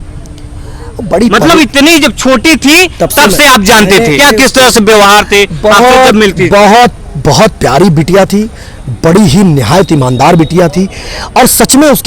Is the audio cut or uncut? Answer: uncut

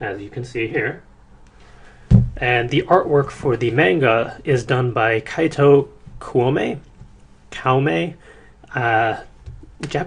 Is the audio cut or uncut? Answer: cut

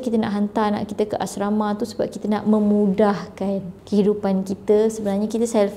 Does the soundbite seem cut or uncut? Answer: uncut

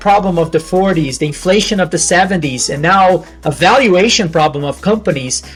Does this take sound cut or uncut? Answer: uncut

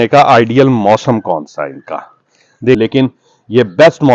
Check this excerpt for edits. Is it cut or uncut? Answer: cut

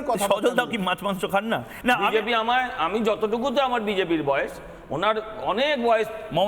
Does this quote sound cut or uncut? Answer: cut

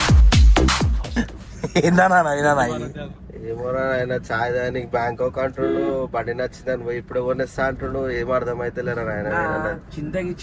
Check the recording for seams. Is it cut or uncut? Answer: uncut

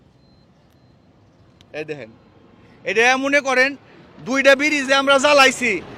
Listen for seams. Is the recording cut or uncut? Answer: uncut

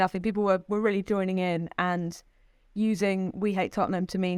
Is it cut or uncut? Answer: uncut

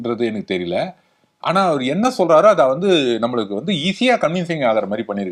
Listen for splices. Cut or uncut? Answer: uncut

